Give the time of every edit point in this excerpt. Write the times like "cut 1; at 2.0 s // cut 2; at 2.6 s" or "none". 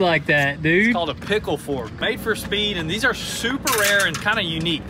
cut 1; at 1.9 s